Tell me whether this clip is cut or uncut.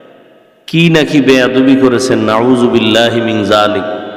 uncut